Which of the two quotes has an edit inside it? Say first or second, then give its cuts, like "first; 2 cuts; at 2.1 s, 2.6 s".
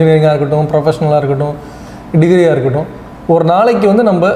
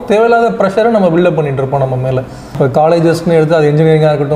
second; 1 cut; at 2.5 s